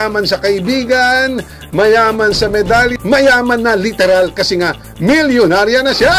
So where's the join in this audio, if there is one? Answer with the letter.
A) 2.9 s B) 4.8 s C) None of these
A